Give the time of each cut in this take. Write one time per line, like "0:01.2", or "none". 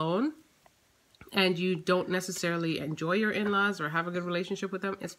none